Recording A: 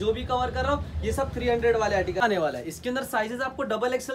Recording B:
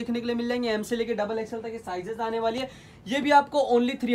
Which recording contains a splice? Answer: A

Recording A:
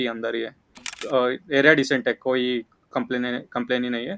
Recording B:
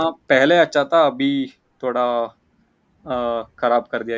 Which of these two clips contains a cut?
A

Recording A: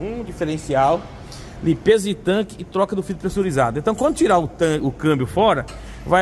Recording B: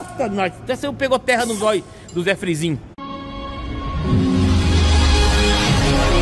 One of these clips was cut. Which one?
B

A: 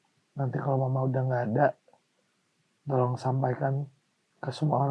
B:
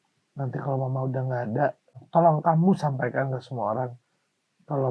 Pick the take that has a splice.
B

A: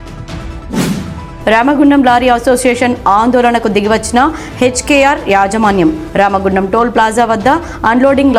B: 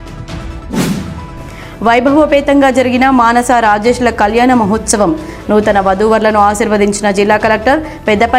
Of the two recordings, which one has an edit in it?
B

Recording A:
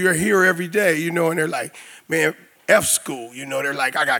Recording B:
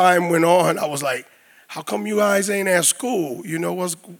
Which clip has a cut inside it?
A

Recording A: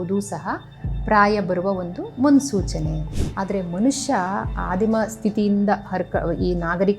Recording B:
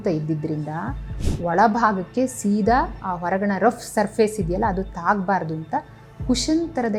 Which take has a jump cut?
A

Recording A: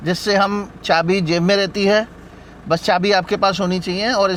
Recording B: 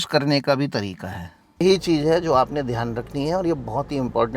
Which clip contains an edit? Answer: B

